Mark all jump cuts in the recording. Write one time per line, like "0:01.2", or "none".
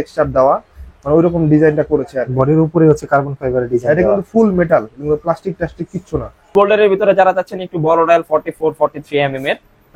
0:06.5